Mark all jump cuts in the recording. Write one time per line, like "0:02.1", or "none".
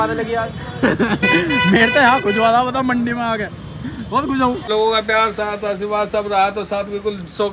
0:04.7